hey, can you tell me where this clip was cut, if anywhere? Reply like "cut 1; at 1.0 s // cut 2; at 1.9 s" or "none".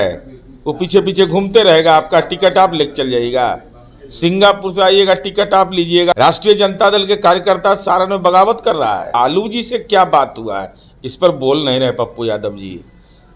cut 1; at 6.1 s // cut 2; at 9.2 s